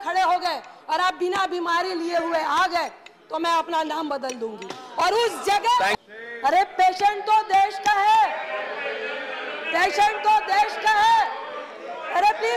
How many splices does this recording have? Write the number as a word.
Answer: one